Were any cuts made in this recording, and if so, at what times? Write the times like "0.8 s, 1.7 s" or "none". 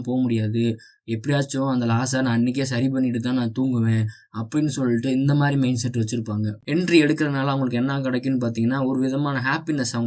6.6 s